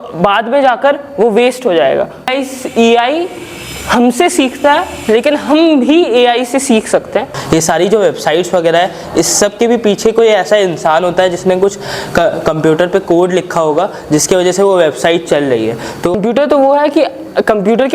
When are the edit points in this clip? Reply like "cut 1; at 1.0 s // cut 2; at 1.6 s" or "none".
cut 1; at 2.3 s // cut 2; at 7.4 s // cut 3; at 16.1 s